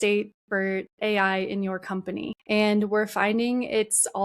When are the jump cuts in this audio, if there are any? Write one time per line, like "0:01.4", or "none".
0:02.4